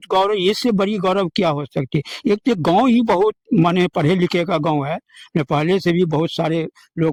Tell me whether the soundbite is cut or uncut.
uncut